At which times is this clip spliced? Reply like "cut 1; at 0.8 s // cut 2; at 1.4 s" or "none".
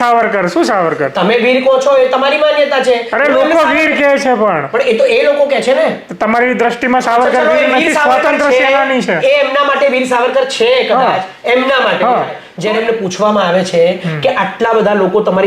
cut 1; at 12.5 s